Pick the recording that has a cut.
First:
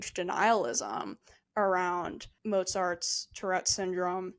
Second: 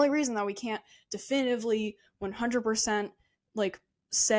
first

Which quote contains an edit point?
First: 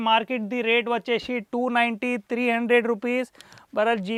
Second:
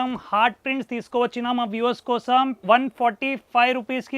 second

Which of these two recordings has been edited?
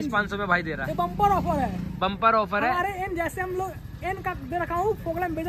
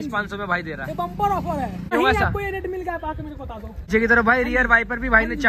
second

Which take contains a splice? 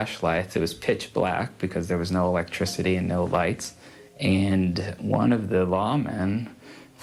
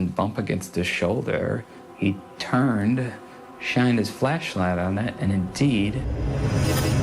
second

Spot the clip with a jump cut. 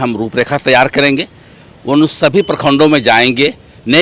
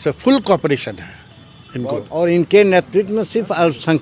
second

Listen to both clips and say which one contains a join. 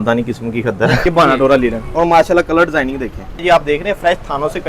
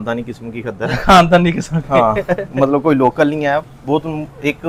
first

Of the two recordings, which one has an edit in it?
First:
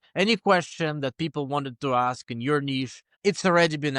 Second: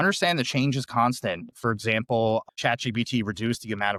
first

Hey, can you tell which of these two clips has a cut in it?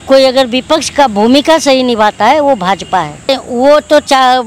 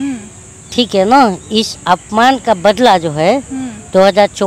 first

